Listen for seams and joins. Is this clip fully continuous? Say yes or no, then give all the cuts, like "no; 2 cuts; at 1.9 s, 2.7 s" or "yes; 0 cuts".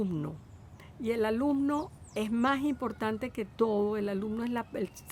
yes; 0 cuts